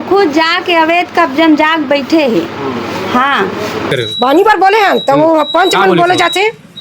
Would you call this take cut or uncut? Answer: cut